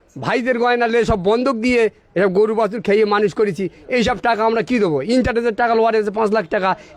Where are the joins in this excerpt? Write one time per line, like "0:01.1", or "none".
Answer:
none